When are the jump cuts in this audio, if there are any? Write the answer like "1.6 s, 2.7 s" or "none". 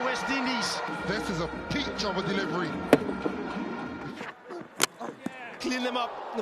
0.9 s, 4.0 s